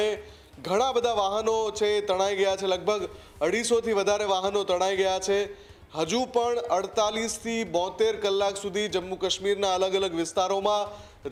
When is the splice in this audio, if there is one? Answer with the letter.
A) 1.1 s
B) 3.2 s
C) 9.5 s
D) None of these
D